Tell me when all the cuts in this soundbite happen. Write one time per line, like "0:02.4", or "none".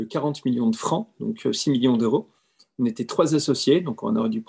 none